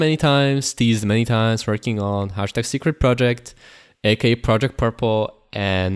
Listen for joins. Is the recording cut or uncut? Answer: uncut